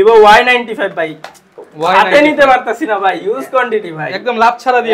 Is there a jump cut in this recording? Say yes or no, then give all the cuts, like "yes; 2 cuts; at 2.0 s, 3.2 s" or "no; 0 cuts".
no; 0 cuts